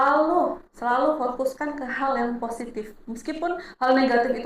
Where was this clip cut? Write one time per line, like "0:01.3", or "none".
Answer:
none